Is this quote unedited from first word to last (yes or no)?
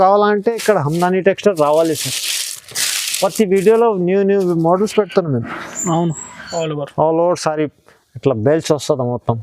no